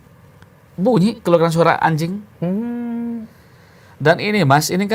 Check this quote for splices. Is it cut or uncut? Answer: uncut